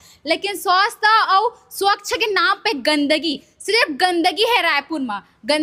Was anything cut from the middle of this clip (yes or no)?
no